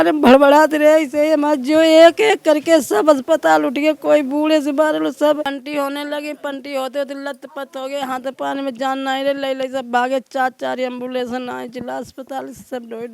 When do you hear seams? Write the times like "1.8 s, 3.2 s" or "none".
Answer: 5.4 s